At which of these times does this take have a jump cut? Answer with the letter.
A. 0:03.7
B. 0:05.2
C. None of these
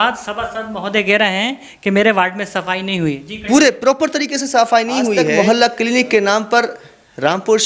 B